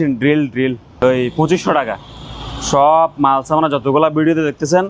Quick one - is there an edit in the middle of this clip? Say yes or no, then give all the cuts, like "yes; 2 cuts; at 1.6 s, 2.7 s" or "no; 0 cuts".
yes; 1 cut; at 1.3 s